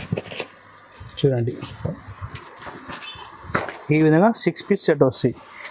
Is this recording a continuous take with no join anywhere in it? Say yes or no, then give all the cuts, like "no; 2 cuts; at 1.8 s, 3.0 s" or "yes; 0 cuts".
yes; 0 cuts